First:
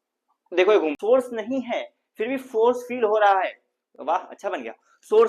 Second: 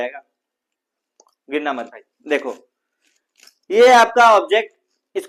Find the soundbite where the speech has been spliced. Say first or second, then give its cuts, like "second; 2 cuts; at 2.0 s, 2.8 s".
first; 1 cut; at 1.0 s